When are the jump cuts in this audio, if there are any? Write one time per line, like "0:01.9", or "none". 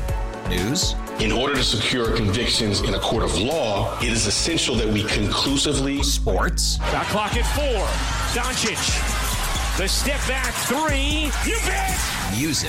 none